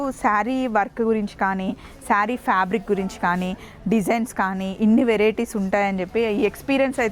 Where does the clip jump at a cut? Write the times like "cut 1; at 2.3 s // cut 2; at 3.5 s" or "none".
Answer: none